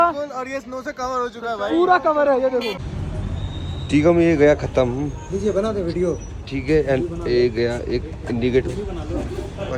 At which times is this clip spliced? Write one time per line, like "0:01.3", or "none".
0:02.8